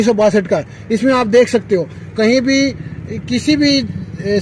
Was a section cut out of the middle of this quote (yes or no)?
no